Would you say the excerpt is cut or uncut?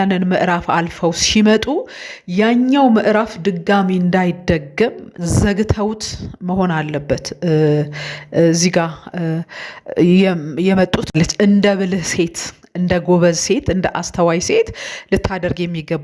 cut